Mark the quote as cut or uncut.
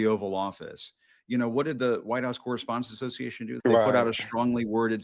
cut